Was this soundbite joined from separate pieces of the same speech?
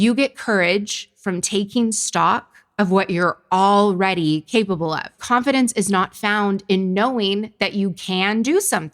yes; 1 cut; at 5.1 s

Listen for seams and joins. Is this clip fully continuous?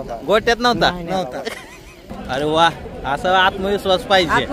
no; 1 cut; at 2.1 s

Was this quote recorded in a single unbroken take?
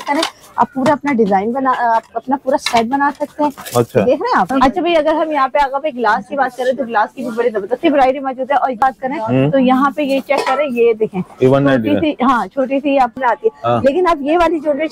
no; 3 cuts; at 4.8 s, 8.8 s, 13.2 s

